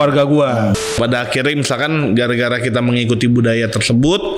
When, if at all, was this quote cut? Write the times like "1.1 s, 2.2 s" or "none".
0.9 s